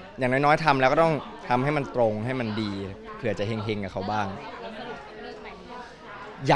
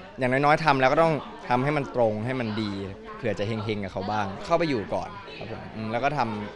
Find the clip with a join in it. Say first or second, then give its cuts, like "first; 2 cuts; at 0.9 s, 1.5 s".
second; 1 cut; at 4.4 s